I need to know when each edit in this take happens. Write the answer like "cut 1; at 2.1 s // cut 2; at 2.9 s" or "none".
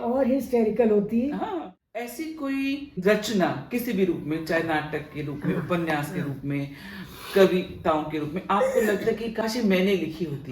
cut 1; at 1.5 s // cut 2; at 3.0 s // cut 3; at 9.4 s